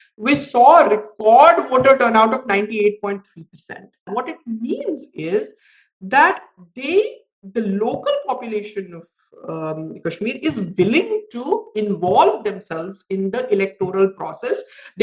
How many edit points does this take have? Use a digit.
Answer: 1